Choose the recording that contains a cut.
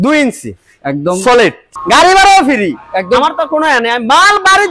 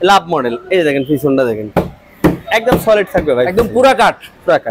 first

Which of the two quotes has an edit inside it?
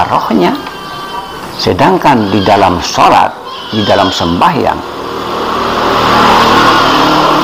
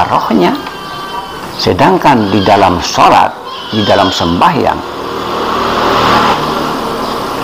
second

